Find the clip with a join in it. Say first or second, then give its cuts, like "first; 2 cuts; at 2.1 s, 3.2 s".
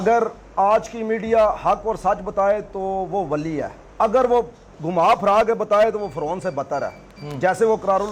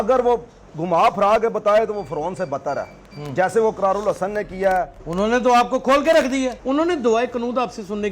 second; 2 cuts; at 5.0 s, 6.6 s